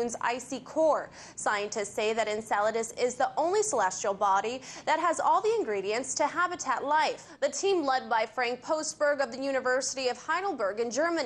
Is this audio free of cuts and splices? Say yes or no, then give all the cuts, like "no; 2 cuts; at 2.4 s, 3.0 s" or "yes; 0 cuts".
yes; 0 cuts